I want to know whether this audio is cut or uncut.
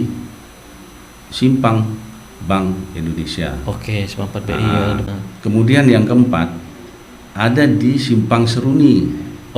cut